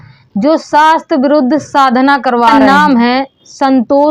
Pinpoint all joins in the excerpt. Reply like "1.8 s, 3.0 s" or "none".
2.5 s